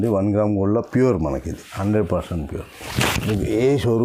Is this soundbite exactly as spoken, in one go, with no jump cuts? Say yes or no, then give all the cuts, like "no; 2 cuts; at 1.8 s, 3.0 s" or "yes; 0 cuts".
yes; 0 cuts